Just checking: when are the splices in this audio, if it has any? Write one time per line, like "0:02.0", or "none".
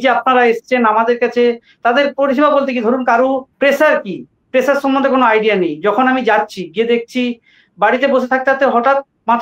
0:03.5